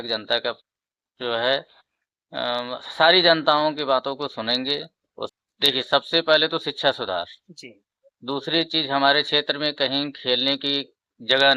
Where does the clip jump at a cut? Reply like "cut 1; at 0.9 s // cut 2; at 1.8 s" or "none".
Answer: cut 1; at 5.3 s